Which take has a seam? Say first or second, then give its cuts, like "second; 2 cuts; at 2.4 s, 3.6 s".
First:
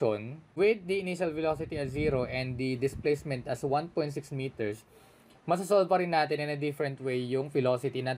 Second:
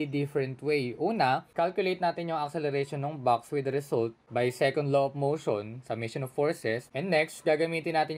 second; 3 cuts; at 1.5 s, 4.2 s, 6.9 s